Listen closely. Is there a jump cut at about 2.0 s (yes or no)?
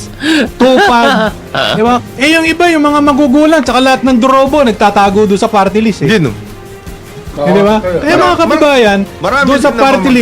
yes